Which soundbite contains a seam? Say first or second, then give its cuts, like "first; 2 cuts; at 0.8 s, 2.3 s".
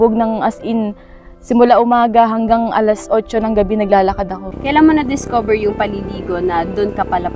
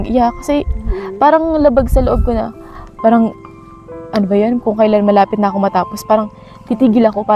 first; 1 cut; at 4.5 s